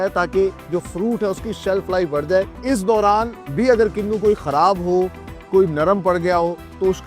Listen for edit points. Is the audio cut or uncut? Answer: cut